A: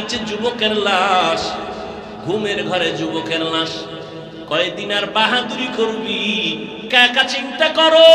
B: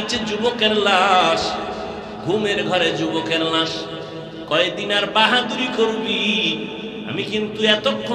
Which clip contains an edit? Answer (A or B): A